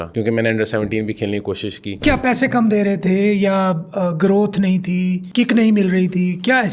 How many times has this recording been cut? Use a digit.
1